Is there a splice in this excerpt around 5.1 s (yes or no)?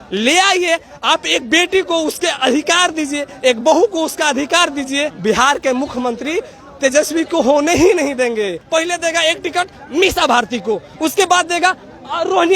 yes